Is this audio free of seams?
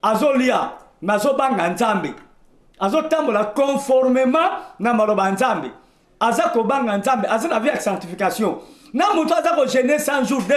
yes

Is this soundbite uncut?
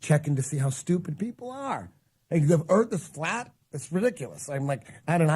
no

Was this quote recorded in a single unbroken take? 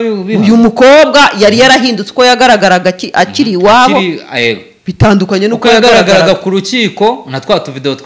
yes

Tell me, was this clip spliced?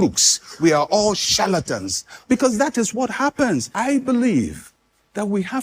yes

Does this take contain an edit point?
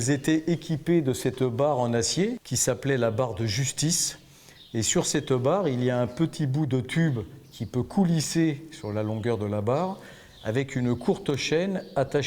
yes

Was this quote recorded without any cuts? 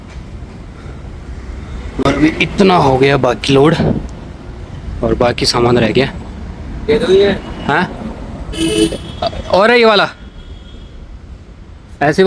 yes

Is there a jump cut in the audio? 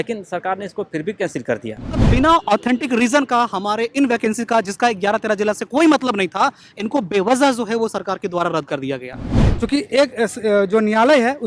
yes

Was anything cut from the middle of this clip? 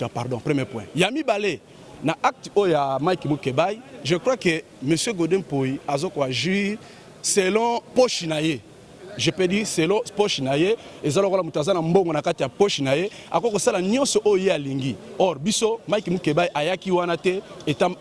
no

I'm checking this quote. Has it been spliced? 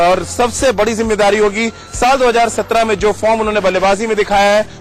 no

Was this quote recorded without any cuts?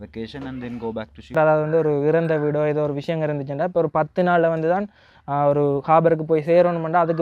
no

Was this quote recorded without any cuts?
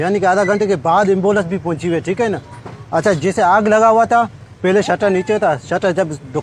yes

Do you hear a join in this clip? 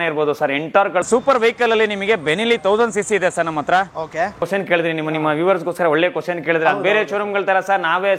yes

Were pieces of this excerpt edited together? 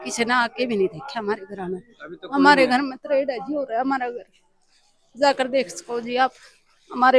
no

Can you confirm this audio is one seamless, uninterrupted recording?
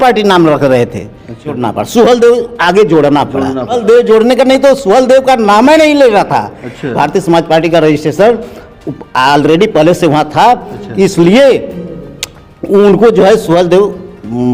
no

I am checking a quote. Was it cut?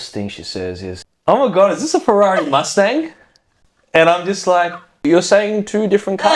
yes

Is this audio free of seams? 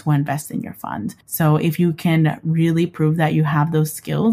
no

